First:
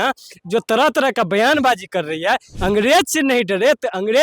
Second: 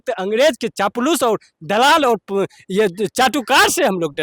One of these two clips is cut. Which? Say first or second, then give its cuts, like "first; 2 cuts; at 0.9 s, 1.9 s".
first; 1 cut; at 2.5 s